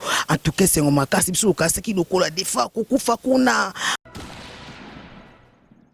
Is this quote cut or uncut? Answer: cut